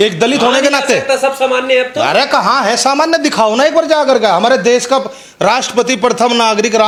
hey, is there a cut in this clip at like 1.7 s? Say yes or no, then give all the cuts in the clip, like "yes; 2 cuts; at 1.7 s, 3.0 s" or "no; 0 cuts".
no; 0 cuts